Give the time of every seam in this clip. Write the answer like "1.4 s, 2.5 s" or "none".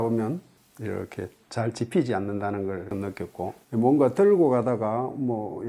none

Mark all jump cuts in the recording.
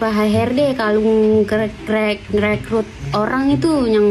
none

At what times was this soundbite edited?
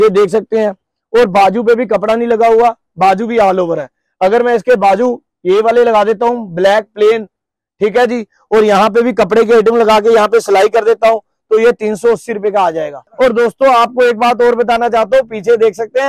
13.0 s

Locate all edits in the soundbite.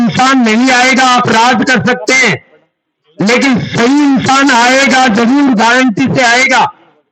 none

